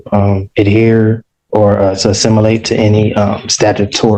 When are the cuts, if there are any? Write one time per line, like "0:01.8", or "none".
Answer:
none